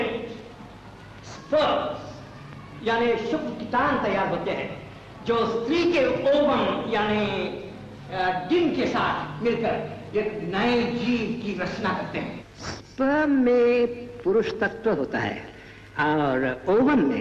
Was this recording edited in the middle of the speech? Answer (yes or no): yes